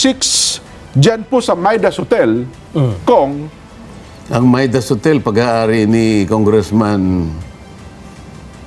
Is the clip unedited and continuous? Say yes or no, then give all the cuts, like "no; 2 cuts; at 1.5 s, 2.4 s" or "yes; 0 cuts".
yes; 0 cuts